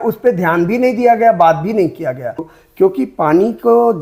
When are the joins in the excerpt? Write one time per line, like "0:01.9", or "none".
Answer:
0:02.5